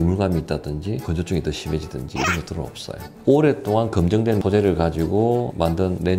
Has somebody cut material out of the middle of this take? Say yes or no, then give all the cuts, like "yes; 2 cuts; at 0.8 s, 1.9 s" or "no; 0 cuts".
no; 0 cuts